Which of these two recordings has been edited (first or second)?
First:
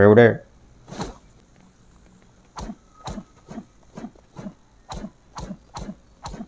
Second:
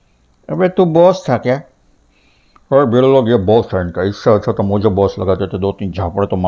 first